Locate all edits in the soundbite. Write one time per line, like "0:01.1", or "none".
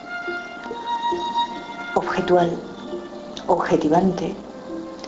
0:04.0